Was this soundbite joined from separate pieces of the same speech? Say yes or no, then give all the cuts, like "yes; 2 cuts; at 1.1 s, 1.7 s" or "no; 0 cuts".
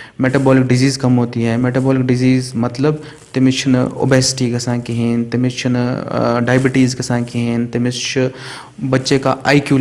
no; 0 cuts